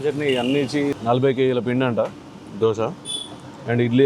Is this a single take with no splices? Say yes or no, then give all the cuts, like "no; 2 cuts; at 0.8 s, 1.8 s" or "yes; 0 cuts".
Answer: no; 1 cut; at 0.9 s